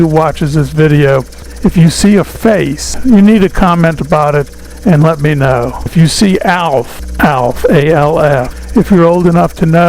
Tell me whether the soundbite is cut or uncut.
cut